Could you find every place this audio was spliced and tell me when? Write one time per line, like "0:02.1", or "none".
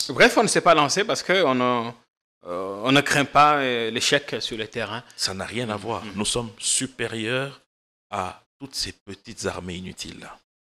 none